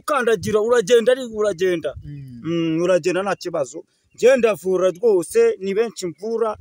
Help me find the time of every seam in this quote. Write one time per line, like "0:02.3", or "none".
none